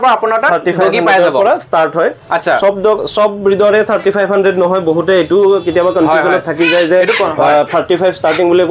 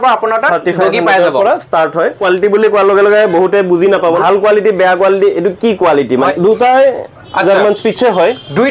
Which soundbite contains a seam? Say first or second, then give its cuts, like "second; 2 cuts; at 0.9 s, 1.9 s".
second; 3 cuts; at 2.2 s, 4.2 s, 6.3 s